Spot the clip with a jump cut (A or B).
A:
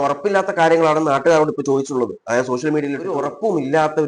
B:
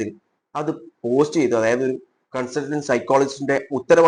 A